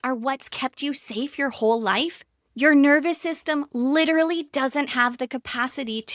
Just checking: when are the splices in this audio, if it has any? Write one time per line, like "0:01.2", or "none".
none